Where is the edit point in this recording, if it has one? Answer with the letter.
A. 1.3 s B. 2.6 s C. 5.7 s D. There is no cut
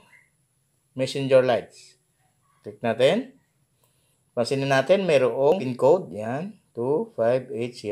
C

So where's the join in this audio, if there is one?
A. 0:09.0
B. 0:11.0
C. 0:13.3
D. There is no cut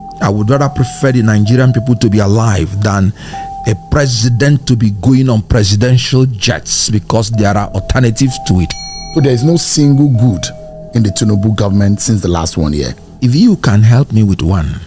A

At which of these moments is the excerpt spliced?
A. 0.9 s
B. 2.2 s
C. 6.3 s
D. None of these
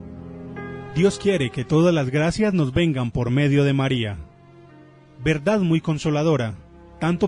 A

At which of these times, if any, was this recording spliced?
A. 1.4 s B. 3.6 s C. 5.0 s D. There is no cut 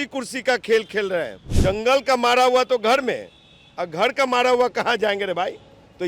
A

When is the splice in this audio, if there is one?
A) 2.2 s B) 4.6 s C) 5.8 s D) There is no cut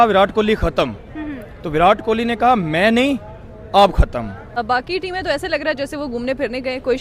B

